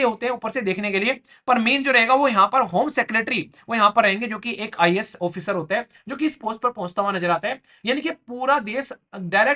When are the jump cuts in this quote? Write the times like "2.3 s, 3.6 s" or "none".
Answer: none